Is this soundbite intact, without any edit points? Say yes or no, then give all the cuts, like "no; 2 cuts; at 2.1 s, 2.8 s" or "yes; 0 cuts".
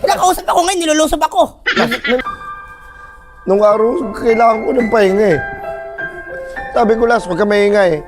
no; 1 cut; at 2.2 s